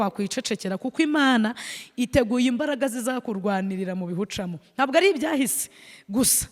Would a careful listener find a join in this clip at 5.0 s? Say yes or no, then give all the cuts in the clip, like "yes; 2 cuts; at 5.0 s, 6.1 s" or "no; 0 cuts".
no; 0 cuts